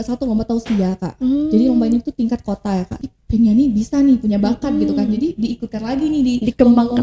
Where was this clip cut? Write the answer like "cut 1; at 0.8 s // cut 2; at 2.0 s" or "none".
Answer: cut 1; at 2.9 s